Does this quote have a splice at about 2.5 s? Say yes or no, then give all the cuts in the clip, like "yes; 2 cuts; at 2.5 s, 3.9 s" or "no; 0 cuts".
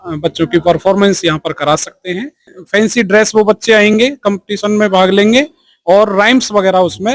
yes; 1 cut; at 2.5 s